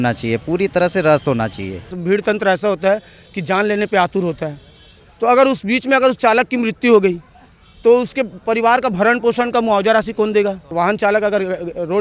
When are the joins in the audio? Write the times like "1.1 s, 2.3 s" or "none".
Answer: 2.0 s, 10.7 s